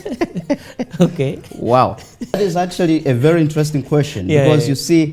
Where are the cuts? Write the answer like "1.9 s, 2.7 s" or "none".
2.4 s